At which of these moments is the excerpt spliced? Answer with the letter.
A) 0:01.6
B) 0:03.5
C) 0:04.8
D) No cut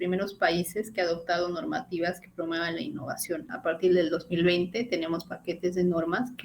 B